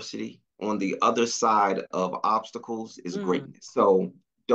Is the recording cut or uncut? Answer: cut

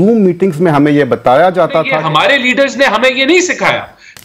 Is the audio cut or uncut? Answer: cut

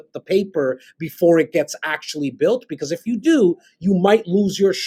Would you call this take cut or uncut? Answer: uncut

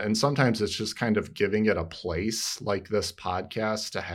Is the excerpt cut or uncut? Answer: uncut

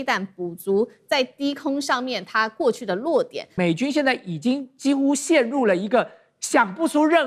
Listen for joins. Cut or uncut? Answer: cut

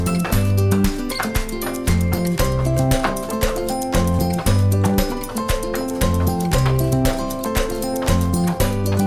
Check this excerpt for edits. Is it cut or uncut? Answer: uncut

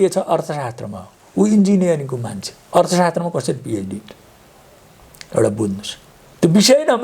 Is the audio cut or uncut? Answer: uncut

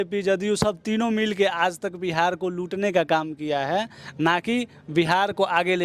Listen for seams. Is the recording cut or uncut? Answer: uncut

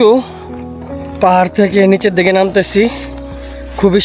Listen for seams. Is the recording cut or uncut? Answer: uncut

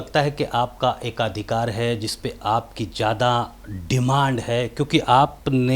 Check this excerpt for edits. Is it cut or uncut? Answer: uncut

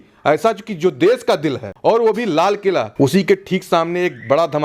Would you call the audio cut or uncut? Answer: cut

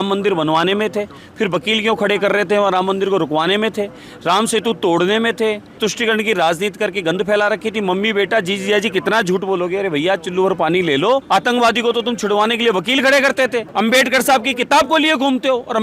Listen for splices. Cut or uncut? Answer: cut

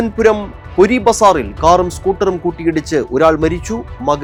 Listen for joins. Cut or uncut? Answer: uncut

